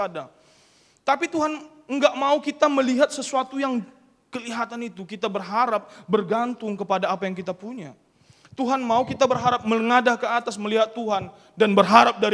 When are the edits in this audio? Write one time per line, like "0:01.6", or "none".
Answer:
none